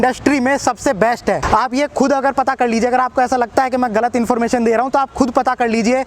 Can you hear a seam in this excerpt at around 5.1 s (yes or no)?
no